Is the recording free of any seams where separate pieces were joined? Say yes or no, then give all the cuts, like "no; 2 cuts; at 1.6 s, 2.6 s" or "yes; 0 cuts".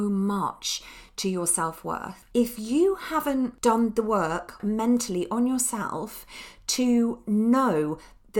no; 3 cuts; at 2.1 s, 3.5 s, 4.6 s